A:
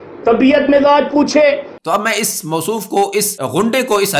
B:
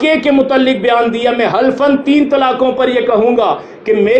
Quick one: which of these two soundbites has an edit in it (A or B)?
A